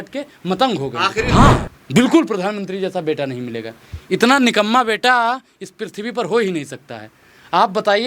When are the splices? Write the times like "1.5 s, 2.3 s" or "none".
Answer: 1.3 s